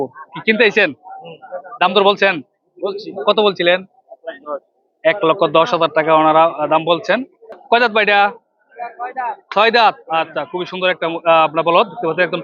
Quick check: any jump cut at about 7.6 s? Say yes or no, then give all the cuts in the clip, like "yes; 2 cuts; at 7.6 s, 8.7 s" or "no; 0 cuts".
yes; 1 cut; at 7.6 s